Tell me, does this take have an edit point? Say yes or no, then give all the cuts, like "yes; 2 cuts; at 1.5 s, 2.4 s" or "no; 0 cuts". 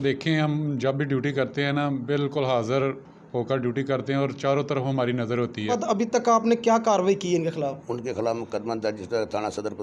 yes; 1 cut; at 5.8 s